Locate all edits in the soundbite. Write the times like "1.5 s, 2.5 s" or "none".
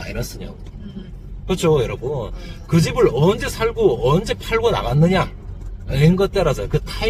none